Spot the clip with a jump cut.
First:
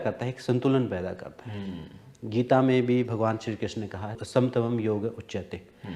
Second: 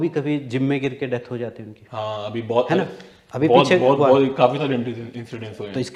first; 1 cut; at 4.2 s

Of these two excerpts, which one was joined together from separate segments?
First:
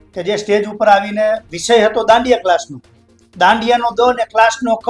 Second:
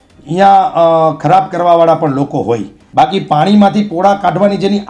second; 1 cut; at 2.8 s

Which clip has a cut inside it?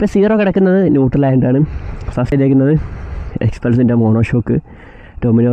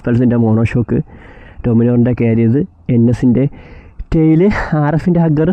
first; 1 cut; at 2.3 s

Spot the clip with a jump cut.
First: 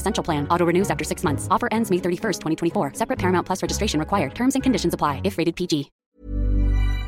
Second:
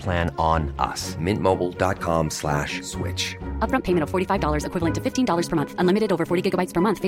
first; 1 cut; at 5.9 s

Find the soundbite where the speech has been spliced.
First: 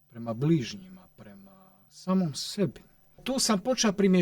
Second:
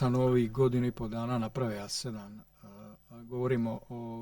first; 1 cut; at 3.2 s

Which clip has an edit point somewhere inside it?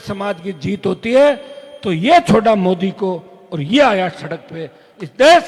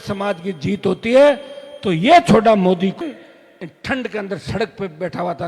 second; 1 cut; at 3.0 s

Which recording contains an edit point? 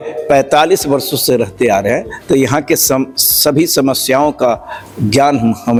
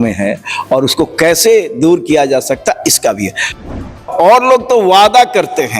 second; 1 cut; at 3.8 s

